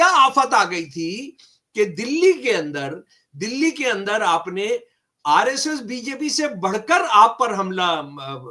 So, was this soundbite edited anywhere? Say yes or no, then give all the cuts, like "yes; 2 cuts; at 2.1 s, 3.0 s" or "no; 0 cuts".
no; 0 cuts